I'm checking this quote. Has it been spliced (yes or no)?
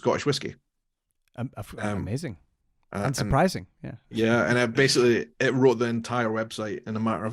no